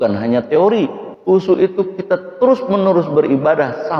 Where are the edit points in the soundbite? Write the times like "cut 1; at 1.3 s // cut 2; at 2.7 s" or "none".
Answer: cut 1; at 1.1 s